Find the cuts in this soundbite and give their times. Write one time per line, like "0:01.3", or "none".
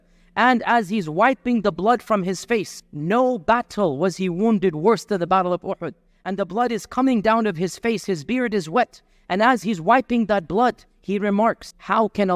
none